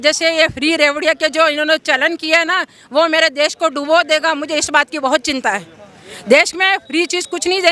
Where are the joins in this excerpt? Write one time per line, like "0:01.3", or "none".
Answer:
none